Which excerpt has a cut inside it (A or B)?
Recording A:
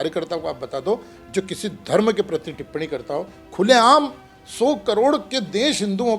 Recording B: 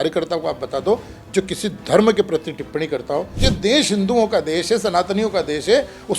B